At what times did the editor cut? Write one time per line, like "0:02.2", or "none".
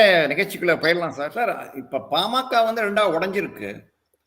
0:01.2